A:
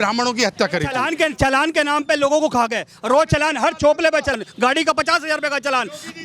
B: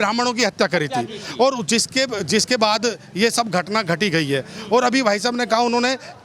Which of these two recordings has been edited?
A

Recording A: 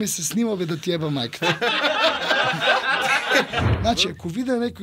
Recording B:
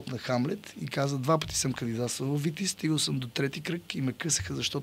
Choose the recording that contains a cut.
A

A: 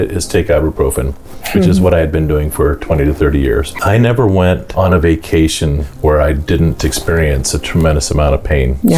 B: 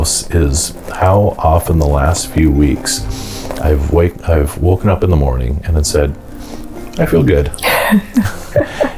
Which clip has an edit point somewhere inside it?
A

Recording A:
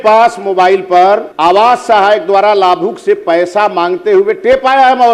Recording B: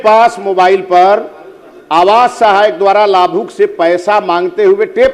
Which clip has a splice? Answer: A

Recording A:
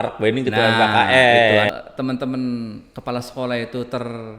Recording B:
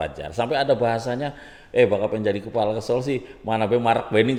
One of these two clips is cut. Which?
A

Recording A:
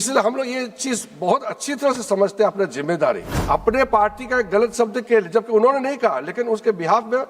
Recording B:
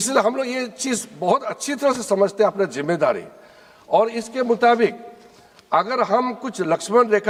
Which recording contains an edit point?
A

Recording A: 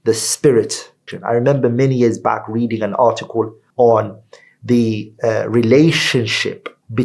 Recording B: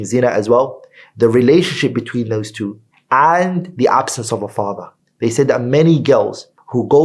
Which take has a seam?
A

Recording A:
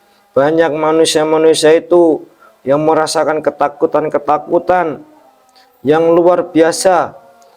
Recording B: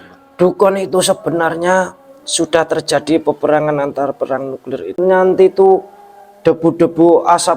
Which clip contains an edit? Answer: B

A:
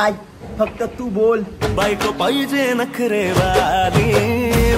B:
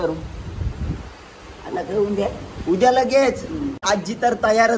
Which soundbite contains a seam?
B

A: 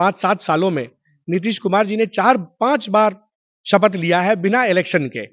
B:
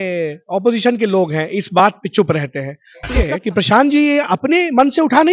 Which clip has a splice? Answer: B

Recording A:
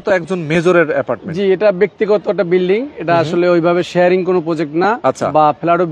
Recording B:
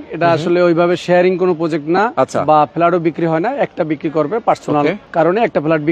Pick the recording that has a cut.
B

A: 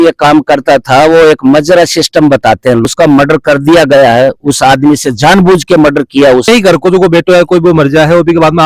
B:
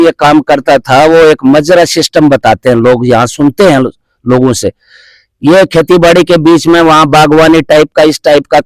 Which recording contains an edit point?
A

